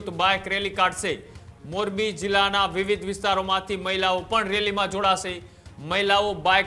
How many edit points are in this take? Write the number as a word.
zero